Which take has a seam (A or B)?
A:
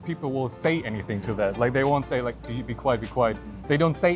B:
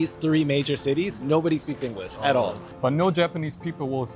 B